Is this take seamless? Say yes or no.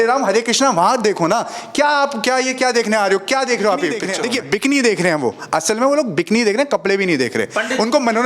no